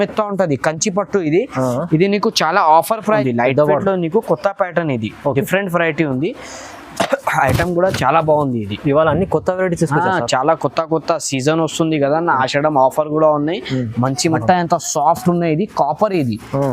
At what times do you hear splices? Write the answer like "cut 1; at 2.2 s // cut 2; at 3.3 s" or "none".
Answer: cut 1; at 3.2 s // cut 2; at 14.4 s

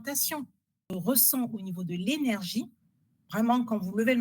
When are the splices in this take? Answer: cut 1; at 0.9 s

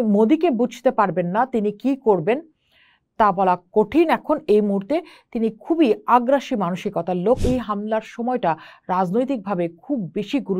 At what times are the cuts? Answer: cut 1; at 7.4 s

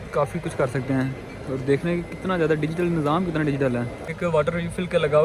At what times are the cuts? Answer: cut 1; at 4.1 s

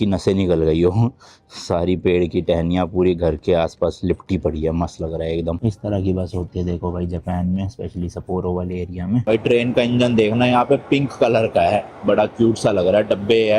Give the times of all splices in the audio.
cut 1; at 5.6 s // cut 2; at 9.2 s

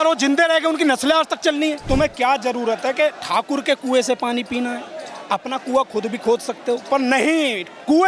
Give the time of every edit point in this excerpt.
cut 1; at 1.8 s

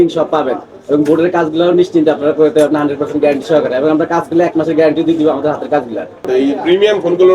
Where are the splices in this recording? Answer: cut 1; at 6.2 s

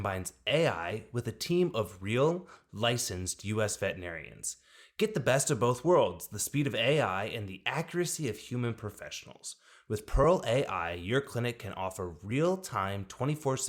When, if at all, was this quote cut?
none

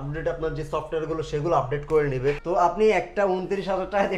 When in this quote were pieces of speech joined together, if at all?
cut 1; at 2.4 s

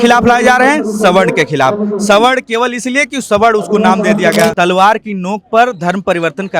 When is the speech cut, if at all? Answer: cut 1; at 4.5 s

